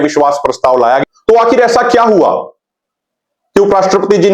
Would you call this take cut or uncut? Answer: cut